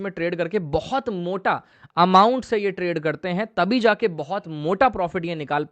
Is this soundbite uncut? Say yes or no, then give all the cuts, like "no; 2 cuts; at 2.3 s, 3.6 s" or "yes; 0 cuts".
yes; 0 cuts